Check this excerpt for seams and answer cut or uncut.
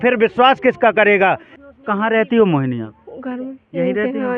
cut